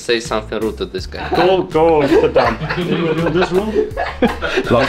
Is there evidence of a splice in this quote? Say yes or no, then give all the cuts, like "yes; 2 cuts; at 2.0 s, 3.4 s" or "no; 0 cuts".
yes; 1 cut; at 1.3 s